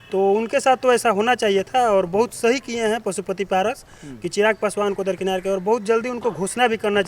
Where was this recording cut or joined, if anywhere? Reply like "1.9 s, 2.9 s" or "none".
none